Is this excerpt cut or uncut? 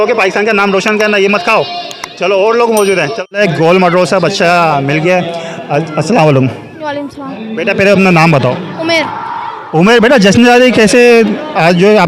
uncut